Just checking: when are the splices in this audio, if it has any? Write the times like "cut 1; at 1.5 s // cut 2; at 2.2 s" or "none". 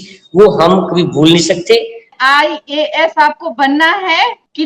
cut 1; at 2.1 s